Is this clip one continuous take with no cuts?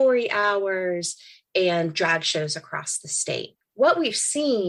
yes; 0 cuts

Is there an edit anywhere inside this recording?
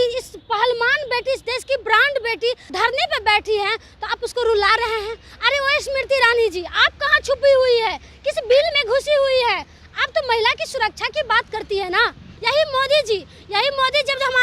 yes; 2 cuts; at 2.7 s, 12.3 s

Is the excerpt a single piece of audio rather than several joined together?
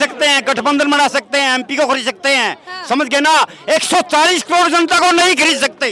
yes; 0 cuts

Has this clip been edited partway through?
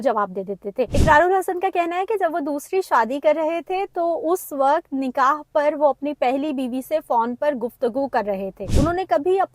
yes; 2 cuts; at 0.9 s, 8.6 s

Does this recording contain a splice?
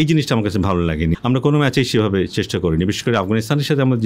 yes; 1 cut; at 1.2 s

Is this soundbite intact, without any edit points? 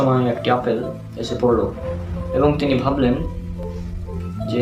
yes; 0 cuts

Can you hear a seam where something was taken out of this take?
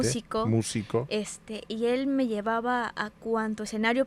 no; 0 cuts

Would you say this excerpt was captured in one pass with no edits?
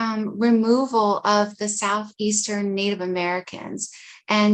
yes; 0 cuts

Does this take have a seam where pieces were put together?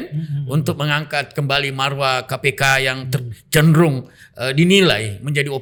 no; 0 cuts

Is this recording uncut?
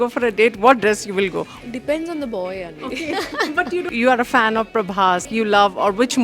no; 3 cuts; at 1.5 s, 3.9 s, 5.2 s

